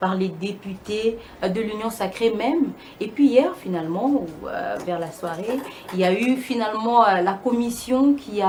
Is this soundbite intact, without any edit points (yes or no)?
yes